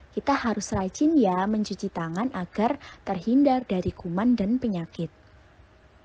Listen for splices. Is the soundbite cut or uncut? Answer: cut